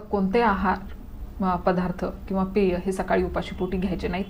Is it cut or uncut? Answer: uncut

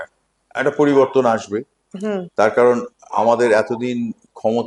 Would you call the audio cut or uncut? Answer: uncut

